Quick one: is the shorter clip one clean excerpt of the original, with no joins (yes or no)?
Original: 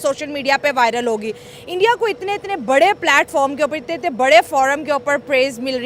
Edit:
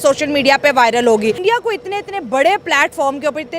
no